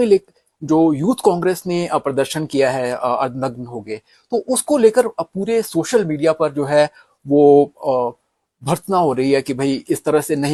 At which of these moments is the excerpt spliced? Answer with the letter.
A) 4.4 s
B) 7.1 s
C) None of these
C